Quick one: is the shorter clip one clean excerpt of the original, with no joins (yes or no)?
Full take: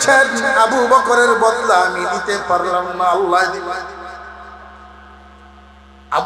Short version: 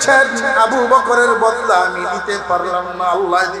yes